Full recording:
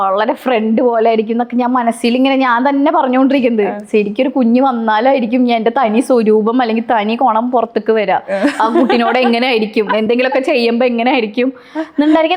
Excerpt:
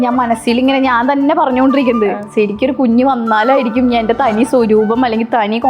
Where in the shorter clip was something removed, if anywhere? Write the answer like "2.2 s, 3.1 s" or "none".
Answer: none